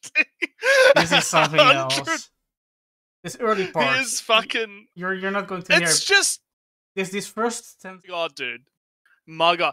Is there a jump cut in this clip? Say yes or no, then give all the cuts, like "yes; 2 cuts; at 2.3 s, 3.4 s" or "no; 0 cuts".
yes; 1 cut; at 8.1 s